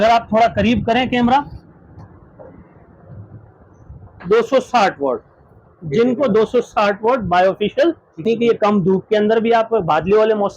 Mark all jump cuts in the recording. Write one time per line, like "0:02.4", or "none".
0:08.2